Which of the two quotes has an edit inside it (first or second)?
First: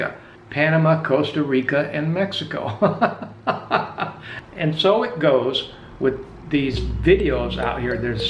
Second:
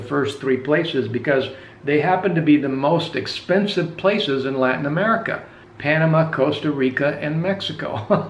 first